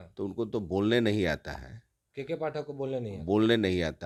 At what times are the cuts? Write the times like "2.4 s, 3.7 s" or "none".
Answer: none